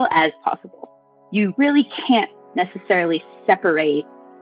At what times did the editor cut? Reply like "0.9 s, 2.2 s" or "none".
none